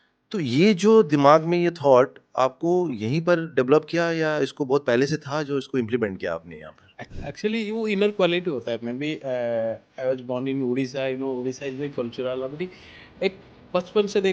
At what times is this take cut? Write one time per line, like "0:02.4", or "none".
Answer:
0:07.1